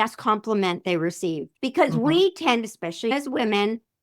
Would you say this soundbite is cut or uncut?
cut